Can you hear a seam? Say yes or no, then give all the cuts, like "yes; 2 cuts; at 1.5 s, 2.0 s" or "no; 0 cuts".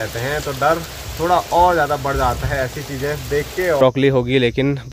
yes; 1 cut; at 3.8 s